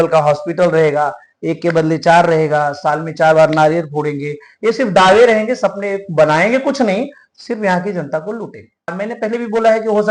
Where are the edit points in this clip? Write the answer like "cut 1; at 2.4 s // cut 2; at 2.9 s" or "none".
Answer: cut 1; at 9.0 s